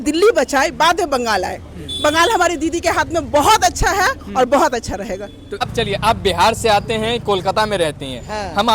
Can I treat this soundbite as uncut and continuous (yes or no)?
no